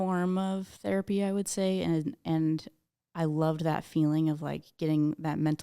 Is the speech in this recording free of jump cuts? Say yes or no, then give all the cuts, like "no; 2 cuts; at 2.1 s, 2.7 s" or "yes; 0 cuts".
yes; 0 cuts